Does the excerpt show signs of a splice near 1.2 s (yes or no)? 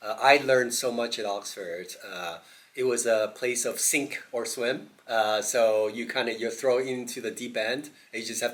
no